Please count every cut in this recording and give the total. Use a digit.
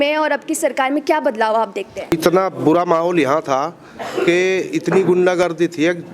1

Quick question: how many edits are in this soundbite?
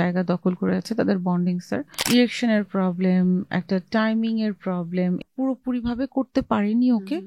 2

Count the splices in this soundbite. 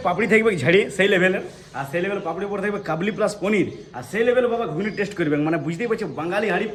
0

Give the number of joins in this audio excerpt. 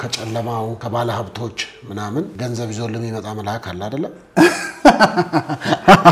2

